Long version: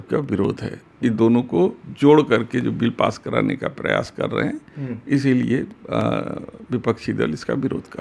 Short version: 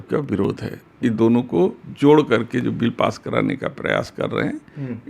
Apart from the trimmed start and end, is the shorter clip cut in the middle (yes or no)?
no